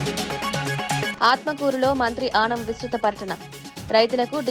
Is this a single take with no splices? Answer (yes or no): no